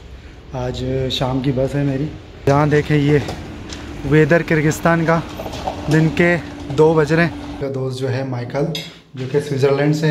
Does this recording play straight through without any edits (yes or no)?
no